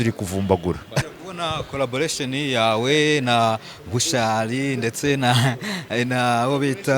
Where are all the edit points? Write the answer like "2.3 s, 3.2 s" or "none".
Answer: 1.0 s